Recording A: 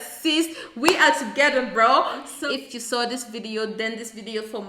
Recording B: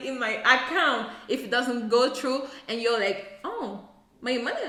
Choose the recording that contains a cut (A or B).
A